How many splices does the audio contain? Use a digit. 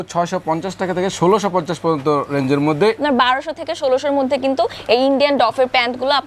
1